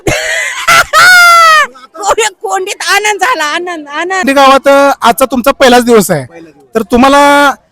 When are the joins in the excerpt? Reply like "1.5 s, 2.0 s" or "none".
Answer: 4.2 s